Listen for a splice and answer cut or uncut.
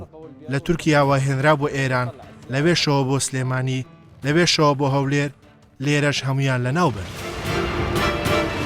cut